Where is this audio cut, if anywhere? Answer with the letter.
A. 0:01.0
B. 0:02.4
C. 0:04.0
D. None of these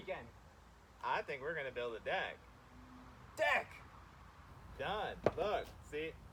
D